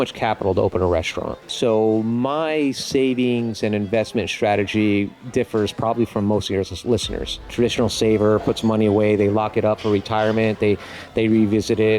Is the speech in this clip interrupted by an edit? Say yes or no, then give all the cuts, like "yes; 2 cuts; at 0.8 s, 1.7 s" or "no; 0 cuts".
yes; 2 cuts; at 1.5 s, 7.5 s